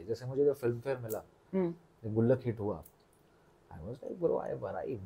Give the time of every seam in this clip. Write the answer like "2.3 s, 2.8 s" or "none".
none